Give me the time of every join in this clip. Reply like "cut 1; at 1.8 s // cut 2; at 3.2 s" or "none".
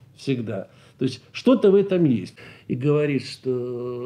cut 1; at 2.3 s